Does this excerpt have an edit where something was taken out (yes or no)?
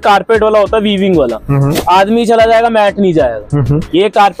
no